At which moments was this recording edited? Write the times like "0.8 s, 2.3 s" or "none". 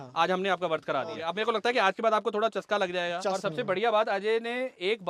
1.2 s, 3.2 s